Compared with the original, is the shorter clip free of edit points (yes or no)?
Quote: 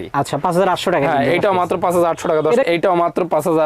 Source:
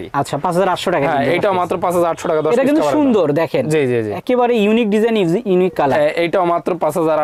no